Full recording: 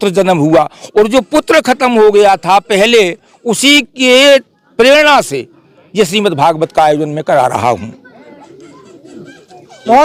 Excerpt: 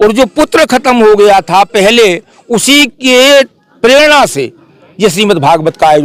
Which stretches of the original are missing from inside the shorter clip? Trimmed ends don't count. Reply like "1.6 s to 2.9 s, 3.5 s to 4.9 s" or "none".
none